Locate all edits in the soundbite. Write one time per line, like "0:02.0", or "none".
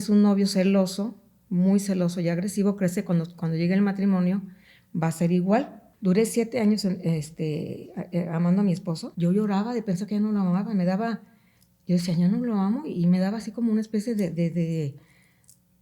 0:05.8
0:09.1